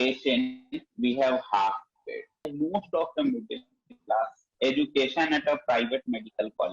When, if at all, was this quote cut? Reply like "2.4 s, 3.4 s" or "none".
2.5 s